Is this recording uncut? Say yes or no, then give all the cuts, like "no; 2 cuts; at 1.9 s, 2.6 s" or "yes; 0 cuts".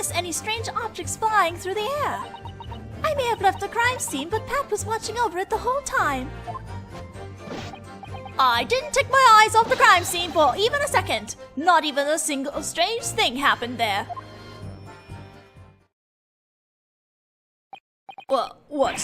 no; 1 cut; at 6.4 s